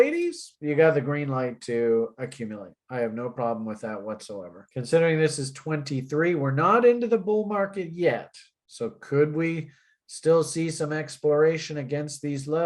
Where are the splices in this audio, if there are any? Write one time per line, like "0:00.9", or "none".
0:04.6